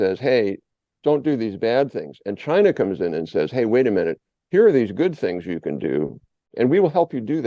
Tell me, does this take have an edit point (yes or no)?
yes